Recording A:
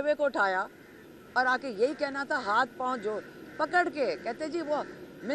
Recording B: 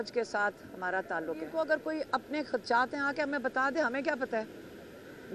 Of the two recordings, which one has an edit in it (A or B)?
B